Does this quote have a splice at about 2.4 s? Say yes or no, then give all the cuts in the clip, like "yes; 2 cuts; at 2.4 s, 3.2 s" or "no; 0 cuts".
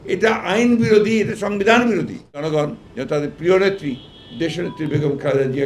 yes; 1 cut; at 2.4 s